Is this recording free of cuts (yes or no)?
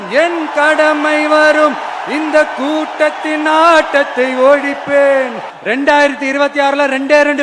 no